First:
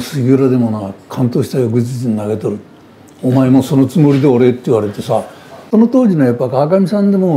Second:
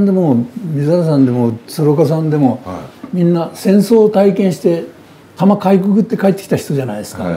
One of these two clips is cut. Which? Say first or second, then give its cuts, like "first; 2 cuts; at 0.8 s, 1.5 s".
first; 1 cut; at 5.6 s